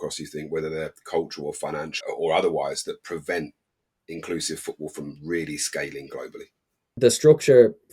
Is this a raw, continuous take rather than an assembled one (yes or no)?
no